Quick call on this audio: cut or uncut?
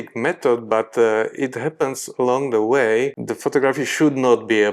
cut